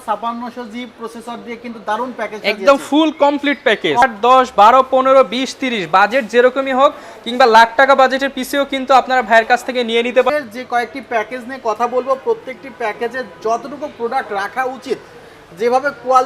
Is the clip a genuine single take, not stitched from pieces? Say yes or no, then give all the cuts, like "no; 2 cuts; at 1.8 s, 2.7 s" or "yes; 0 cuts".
no; 2 cuts; at 4.0 s, 10.3 s